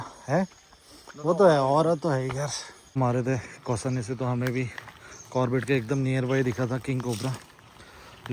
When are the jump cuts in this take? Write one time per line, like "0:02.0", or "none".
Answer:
0:03.0